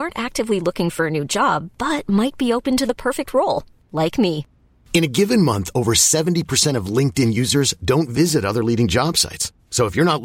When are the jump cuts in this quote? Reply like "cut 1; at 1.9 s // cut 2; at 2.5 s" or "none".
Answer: none